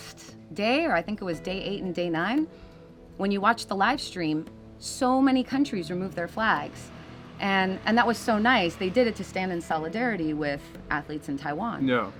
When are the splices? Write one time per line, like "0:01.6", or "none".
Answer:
none